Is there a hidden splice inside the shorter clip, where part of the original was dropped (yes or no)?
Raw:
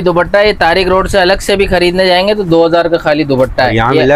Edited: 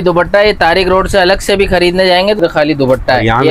yes